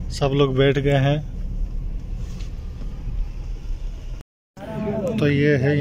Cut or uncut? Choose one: cut